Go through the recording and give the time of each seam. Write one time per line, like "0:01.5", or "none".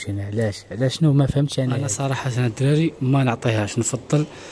0:01.9